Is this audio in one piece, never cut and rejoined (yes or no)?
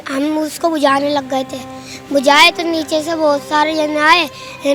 yes